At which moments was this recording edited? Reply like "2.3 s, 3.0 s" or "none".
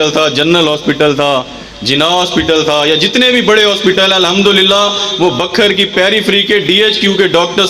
none